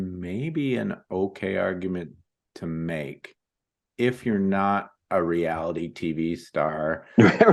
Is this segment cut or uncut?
uncut